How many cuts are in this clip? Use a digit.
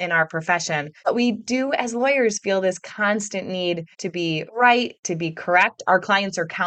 2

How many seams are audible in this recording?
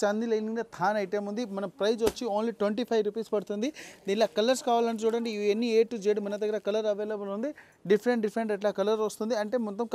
0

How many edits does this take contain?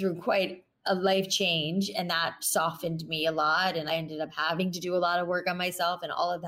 1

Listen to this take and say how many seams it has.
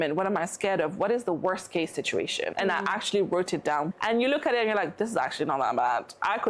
2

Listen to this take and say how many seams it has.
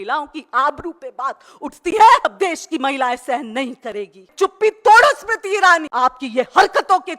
3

